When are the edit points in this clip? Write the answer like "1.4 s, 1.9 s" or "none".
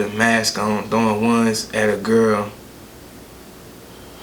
none